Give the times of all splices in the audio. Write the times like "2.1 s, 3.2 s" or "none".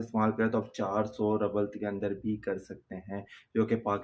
none